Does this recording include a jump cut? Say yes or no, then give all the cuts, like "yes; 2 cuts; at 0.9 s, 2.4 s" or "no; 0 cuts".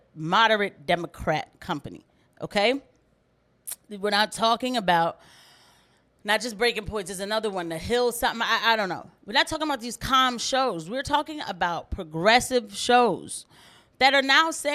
no; 0 cuts